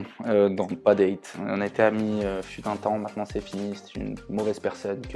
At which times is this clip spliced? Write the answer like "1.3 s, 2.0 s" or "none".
none